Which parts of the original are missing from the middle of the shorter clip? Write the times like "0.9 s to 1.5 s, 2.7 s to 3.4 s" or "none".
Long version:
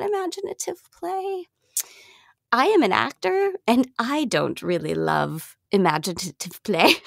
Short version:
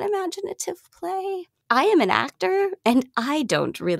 1.5 s to 2.3 s